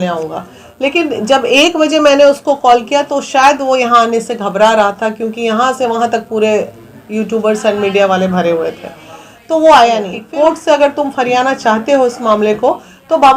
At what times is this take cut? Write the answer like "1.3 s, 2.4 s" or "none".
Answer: 10.2 s

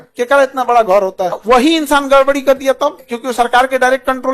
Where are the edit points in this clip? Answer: 1.4 s, 3.0 s

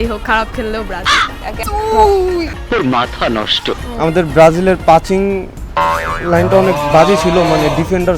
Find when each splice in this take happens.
1.5 s, 2.6 s, 3.8 s

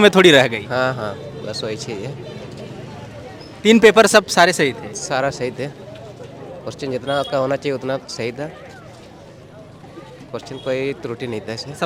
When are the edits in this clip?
none

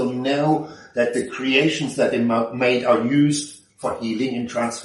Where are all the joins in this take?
none

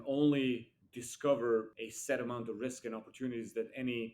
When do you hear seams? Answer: 1.7 s

